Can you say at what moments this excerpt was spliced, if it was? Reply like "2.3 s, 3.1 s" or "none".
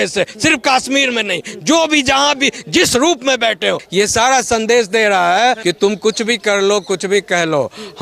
3.8 s, 5.6 s